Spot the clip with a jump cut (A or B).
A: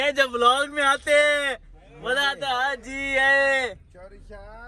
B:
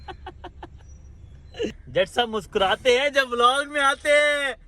B